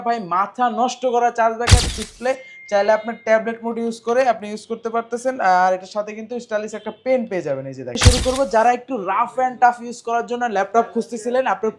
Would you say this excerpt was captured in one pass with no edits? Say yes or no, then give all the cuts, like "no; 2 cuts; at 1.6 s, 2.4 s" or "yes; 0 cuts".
no; 2 cuts; at 1.9 s, 8.0 s